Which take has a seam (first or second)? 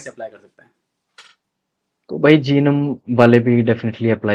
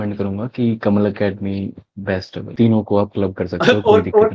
second